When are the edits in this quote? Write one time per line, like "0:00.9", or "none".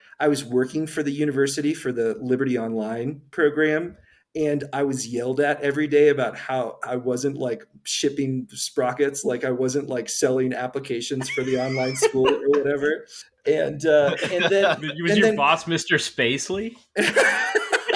none